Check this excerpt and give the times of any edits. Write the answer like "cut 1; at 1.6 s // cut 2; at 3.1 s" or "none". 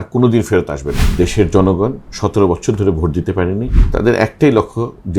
cut 1; at 1.0 s // cut 2; at 3.8 s

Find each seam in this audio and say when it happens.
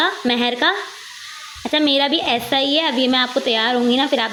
none

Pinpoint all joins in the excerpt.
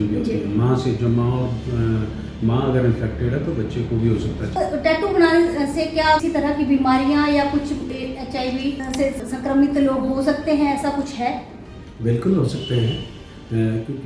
cut 1; at 4.6 s // cut 2; at 6.2 s // cut 3; at 9.3 s

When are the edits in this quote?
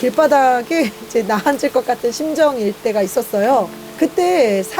cut 1; at 3.8 s

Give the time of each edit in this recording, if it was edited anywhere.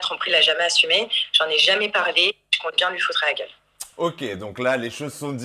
none

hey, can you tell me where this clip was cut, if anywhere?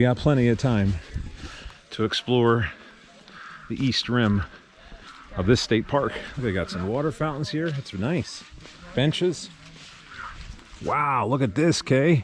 none

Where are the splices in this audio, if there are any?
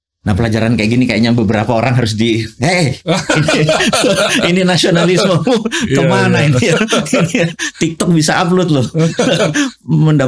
none

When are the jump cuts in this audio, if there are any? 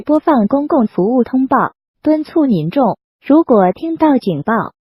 cut 1; at 3.3 s

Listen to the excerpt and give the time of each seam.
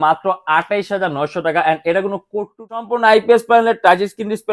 cut 1; at 2.8 s

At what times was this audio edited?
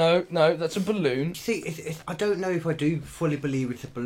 cut 1; at 1.3 s

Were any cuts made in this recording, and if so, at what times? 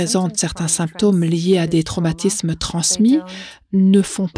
none

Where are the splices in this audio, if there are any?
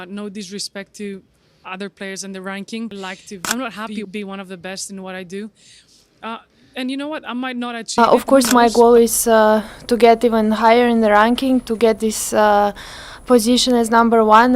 cut 1; at 4.1 s // cut 2; at 8.0 s

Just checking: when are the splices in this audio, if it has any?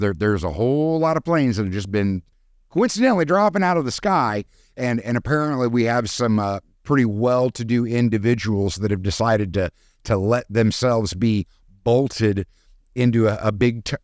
none

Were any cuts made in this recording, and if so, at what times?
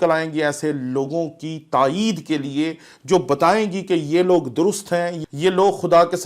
cut 1; at 5.2 s

